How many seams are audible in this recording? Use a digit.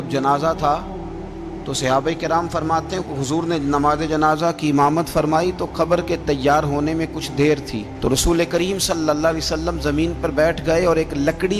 0